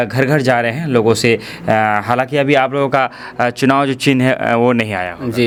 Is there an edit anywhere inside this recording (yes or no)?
no